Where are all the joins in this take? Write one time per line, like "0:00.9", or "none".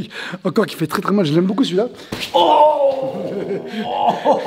0:02.2